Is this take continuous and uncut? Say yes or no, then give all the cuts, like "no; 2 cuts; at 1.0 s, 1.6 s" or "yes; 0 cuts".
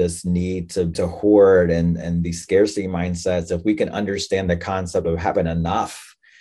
no; 1 cut; at 0.9 s